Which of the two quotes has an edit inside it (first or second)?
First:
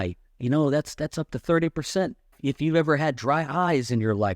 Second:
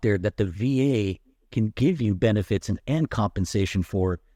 first